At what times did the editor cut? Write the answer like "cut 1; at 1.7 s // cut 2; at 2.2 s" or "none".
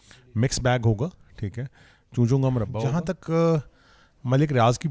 cut 1; at 2.8 s